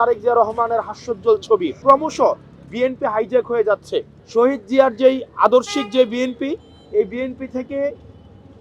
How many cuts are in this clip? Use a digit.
2